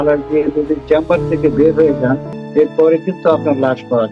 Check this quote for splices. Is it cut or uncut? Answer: cut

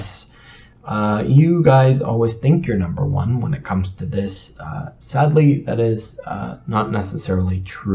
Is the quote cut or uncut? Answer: uncut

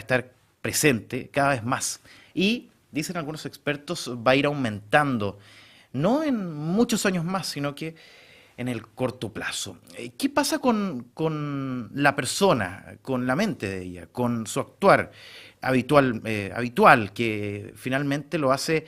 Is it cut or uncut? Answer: cut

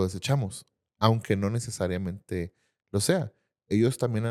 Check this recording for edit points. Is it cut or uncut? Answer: uncut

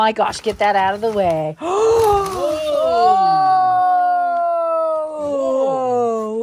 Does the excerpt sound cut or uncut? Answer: uncut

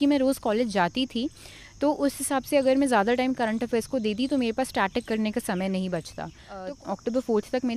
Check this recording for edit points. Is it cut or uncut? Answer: cut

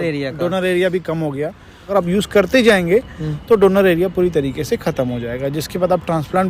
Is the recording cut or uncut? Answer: cut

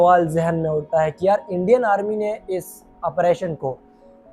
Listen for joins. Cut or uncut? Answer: uncut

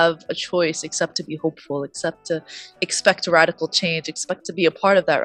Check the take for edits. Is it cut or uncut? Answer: uncut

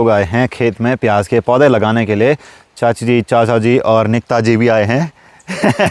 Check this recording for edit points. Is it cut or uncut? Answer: uncut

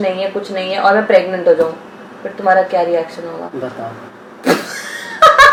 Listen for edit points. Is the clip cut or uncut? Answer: uncut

